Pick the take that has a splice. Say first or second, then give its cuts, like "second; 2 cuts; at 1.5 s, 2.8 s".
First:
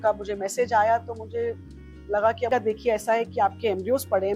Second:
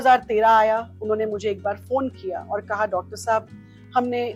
first; 1 cut; at 2.5 s